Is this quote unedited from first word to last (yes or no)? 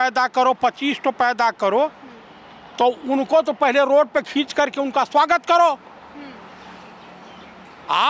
yes